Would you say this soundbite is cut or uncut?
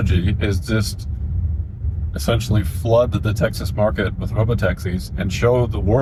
uncut